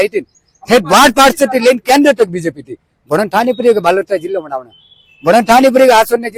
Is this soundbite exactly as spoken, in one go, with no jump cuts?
yes; 0 cuts

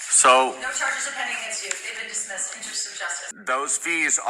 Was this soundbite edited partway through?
yes; 1 cut; at 3.3 s

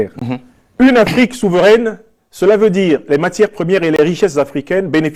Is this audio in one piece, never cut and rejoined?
yes; 0 cuts

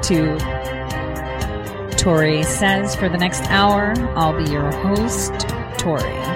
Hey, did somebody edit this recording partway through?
no; 0 cuts

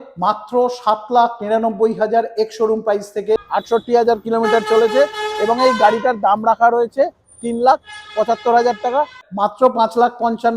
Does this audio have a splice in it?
yes; 2 cuts; at 3.4 s, 9.2 s

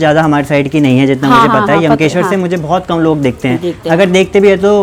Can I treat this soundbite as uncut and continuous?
yes; 0 cuts

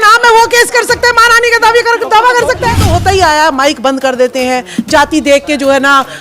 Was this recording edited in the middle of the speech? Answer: yes; 1 cut; at 2.9 s

